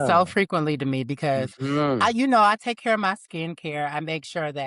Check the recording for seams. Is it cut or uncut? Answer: uncut